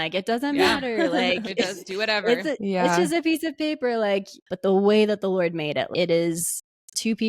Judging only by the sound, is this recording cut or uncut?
cut